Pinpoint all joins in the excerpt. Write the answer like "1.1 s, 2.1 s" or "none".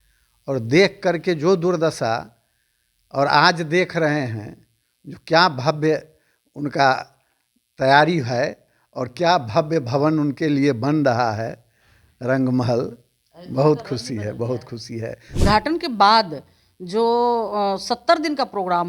15.4 s